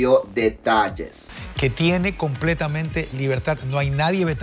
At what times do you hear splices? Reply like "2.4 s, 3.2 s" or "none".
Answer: 1.3 s